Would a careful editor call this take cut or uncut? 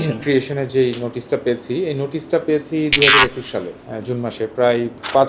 uncut